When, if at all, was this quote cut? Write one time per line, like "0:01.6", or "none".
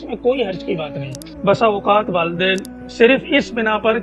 0:01.2